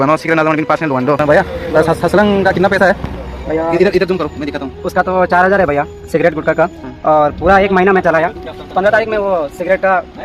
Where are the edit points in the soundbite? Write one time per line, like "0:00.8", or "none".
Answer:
0:01.2
0:06.9